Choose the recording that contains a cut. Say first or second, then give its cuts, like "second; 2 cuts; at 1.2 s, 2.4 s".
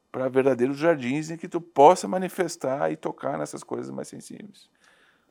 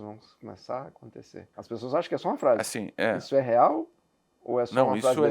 second; 1 cut; at 1.5 s